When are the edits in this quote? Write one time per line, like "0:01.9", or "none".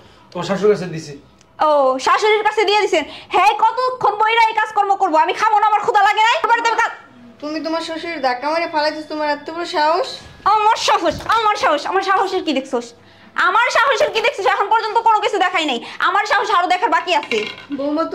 none